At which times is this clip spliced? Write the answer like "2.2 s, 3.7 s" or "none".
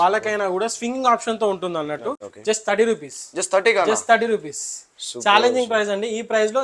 2.3 s